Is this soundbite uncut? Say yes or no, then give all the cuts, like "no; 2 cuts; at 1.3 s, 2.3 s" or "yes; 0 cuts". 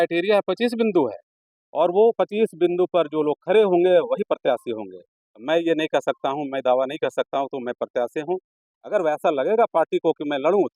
yes; 0 cuts